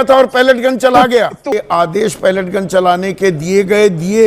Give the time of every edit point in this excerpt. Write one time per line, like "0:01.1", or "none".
0:01.5